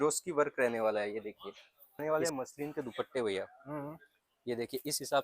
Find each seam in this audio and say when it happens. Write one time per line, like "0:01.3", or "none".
0:02.0